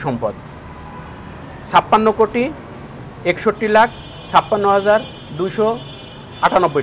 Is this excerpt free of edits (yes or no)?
yes